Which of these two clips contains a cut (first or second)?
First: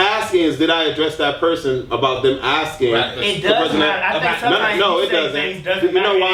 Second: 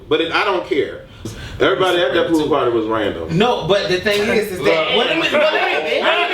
second